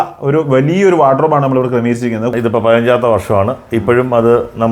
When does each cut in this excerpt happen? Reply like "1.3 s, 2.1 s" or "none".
2.3 s